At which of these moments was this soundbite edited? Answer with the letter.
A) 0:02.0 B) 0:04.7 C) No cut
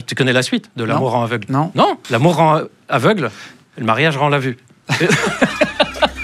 A